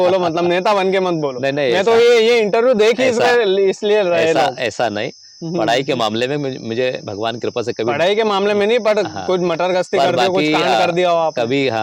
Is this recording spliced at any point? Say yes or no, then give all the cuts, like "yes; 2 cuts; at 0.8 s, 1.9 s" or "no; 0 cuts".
no; 0 cuts